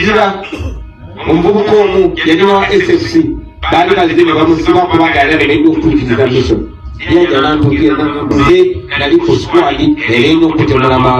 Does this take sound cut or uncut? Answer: cut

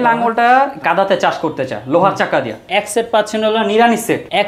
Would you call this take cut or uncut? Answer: cut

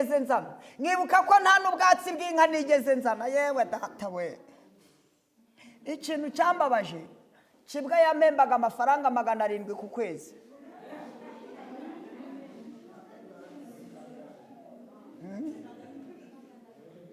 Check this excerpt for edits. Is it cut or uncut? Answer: uncut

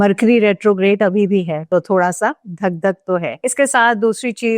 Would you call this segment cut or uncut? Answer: cut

